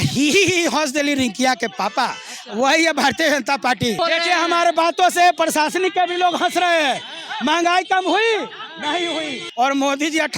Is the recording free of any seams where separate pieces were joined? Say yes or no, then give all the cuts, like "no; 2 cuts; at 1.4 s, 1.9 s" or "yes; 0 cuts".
no; 2 cuts; at 4.0 s, 9.4 s